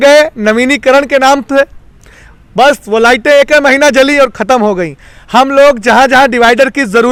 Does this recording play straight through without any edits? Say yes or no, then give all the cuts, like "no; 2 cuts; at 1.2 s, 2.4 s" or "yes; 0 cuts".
yes; 0 cuts